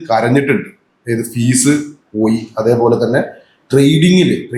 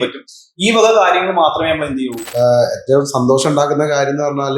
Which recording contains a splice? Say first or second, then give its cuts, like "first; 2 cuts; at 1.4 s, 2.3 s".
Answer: second; 1 cut; at 2.2 s